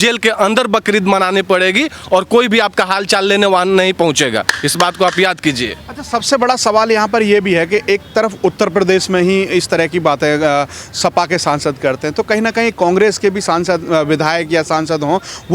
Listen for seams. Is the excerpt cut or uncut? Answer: uncut